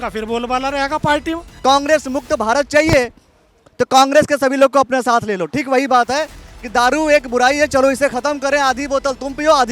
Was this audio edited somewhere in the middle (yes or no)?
yes